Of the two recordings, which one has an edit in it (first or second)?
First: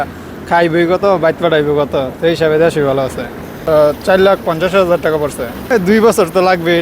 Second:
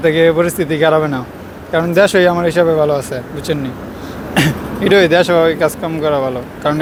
first